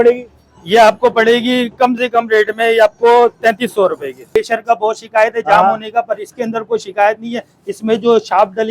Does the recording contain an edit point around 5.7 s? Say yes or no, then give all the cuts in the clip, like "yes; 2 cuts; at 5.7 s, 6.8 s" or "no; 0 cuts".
no; 1 cut; at 4.4 s